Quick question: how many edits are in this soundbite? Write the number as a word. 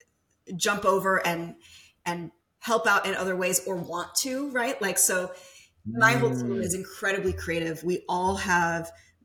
zero